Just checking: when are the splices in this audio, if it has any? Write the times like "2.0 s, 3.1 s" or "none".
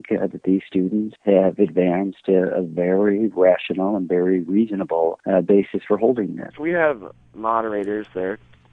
1.1 s, 5.2 s, 6.5 s